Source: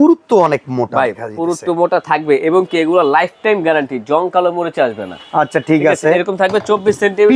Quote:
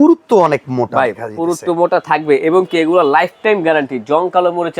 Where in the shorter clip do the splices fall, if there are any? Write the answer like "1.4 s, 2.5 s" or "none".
none